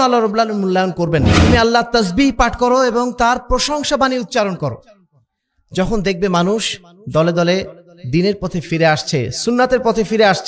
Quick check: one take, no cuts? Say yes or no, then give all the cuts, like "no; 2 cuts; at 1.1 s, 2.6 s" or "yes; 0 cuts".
no; 1 cut; at 1.3 s